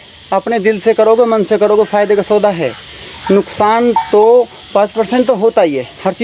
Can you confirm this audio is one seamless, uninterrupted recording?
yes; 0 cuts

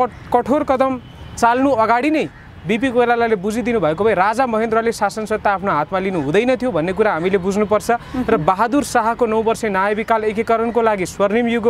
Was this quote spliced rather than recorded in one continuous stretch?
no; 0 cuts

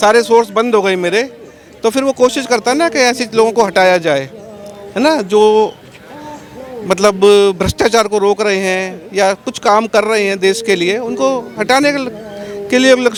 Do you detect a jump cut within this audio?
no; 0 cuts

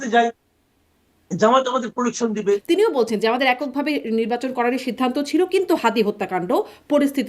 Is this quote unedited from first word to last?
no; 1 cut; at 2.6 s

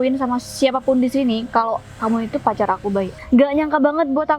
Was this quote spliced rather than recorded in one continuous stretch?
yes; 1 cut; at 3.2 s

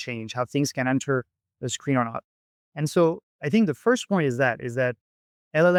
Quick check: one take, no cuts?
yes; 0 cuts

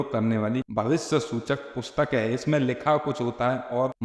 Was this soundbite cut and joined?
no; 0 cuts

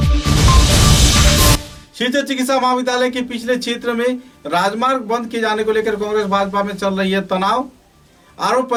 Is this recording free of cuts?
yes; 0 cuts

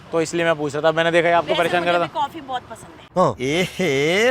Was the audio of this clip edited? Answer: no; 0 cuts

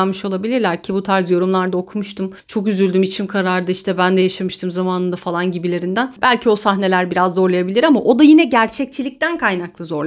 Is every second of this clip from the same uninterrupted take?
yes; 0 cuts

